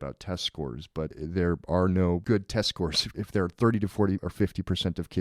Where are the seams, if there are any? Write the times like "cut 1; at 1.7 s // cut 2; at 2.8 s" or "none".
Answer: cut 1; at 1.1 s // cut 2; at 2.2 s // cut 3; at 3.1 s // cut 4; at 4.3 s